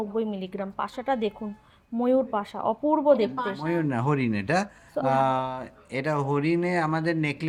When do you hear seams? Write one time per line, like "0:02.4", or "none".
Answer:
none